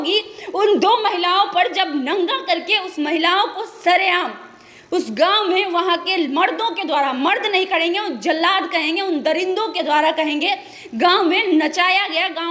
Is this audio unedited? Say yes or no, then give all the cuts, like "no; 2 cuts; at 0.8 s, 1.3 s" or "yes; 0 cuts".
yes; 0 cuts